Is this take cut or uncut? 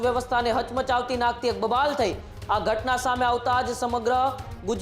cut